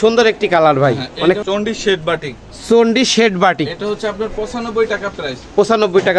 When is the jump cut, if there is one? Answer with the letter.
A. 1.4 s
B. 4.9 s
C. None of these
A